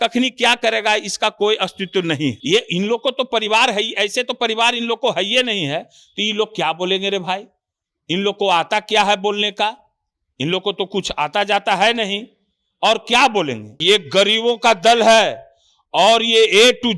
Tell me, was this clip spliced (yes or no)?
yes